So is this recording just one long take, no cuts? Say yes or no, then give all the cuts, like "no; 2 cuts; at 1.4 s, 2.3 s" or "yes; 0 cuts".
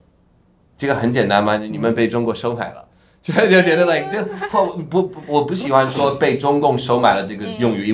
yes; 0 cuts